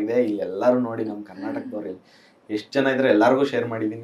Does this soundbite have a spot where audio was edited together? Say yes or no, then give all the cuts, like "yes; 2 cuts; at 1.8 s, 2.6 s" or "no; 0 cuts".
no; 0 cuts